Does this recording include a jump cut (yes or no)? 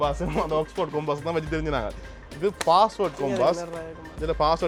no